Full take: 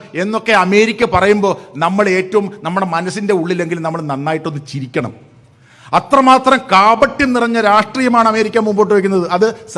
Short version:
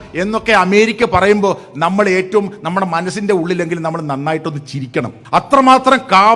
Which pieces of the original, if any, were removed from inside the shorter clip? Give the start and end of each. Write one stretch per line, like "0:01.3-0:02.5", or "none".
0:05.2-0:05.8